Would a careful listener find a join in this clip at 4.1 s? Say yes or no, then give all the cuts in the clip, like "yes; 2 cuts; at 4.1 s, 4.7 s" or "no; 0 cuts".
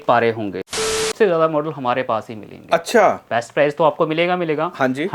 no; 1 cut; at 1.1 s